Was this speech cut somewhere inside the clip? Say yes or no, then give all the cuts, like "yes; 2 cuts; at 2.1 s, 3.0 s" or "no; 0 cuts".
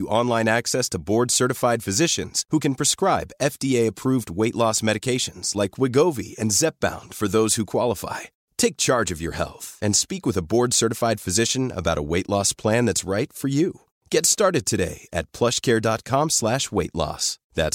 no; 0 cuts